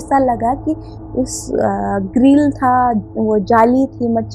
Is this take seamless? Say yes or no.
yes